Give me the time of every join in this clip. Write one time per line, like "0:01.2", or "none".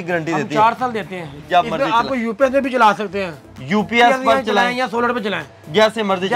0:01.4